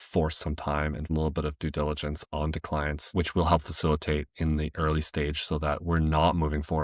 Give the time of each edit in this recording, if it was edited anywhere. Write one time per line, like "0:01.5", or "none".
0:01.0
0:03.0